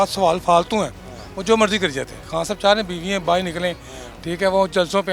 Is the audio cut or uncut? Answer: cut